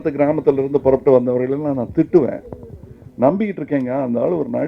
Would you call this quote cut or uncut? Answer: uncut